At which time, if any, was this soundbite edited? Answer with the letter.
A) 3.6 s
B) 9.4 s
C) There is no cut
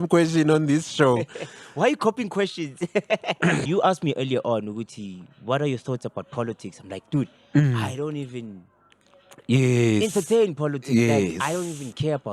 A